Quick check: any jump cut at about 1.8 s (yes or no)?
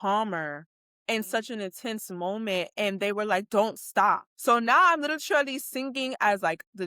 no